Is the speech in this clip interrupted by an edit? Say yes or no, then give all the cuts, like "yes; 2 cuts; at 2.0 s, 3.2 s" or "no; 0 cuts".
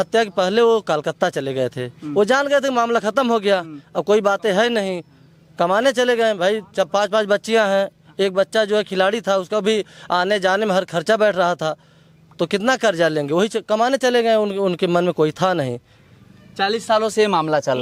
no; 0 cuts